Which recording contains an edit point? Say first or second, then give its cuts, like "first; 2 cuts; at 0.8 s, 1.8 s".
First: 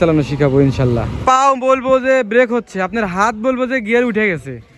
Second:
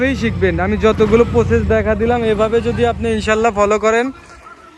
first; 1 cut; at 1.1 s